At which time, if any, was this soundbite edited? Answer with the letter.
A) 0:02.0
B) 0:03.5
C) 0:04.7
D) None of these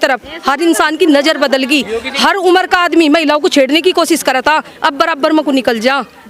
A